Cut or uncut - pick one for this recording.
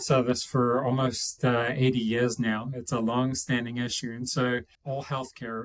cut